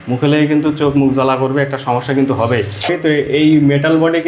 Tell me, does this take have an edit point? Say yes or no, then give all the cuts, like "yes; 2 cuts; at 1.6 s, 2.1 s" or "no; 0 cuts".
yes; 1 cut; at 2.9 s